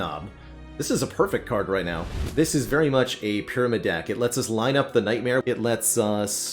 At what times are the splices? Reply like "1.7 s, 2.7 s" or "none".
2.2 s, 5.4 s